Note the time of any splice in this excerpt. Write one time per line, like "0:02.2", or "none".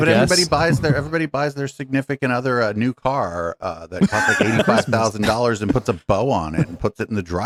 none